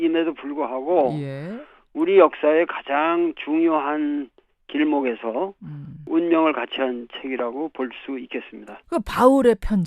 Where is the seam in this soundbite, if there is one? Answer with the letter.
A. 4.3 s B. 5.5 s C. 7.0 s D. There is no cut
C